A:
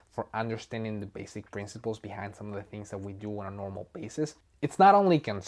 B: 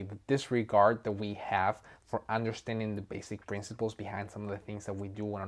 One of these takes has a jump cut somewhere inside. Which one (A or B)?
A